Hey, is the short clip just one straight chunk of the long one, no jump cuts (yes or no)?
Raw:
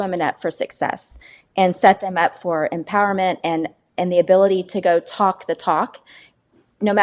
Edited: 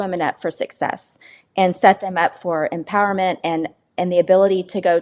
yes